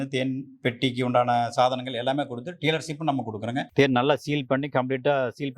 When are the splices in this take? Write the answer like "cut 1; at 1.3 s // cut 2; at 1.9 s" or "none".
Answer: cut 1; at 3.7 s

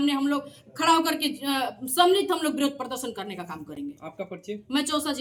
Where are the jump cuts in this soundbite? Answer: none

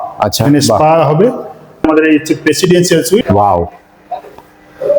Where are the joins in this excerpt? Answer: cut 1; at 1.8 s // cut 2; at 3.2 s

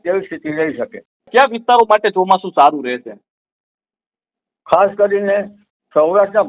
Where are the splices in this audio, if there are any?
cut 1; at 1.3 s

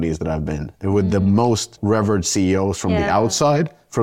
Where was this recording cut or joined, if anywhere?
cut 1; at 1.7 s

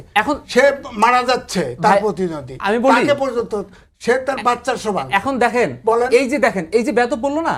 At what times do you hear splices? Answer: none

